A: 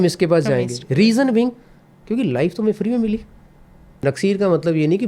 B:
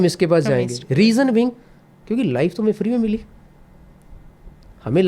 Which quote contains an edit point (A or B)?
A